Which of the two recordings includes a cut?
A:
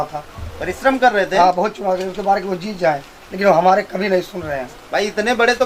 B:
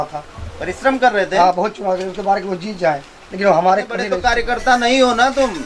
B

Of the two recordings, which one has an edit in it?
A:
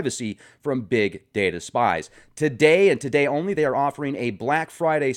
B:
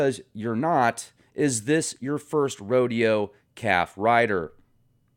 B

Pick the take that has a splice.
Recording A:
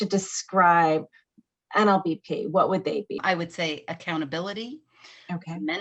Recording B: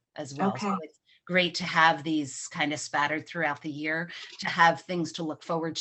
A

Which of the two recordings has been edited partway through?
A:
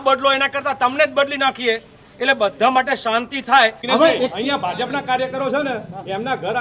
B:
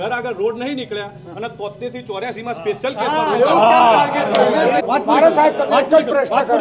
A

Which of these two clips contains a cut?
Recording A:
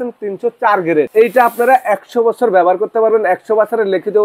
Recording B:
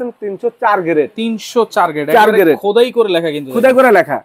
A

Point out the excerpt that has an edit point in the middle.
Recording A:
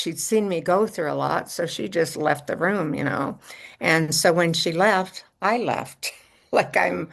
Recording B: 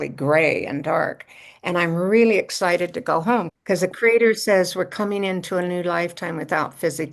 B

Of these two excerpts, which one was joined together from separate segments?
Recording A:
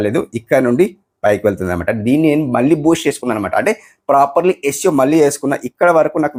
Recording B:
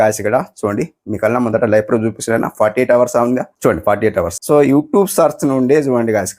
B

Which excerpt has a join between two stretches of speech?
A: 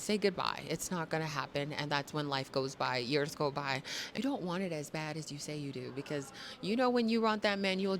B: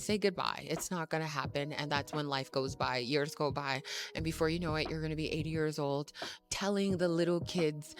A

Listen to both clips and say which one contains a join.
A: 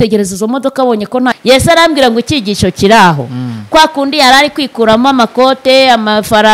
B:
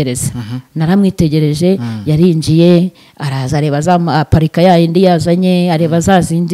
A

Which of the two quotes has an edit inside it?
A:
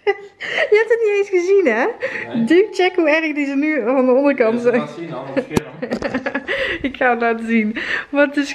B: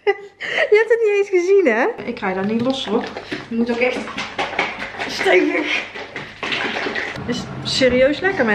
B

